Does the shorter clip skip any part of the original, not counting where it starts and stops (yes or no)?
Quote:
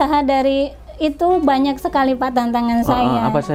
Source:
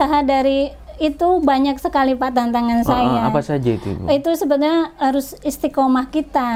no